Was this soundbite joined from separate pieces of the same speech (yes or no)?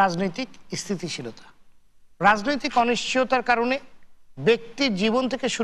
yes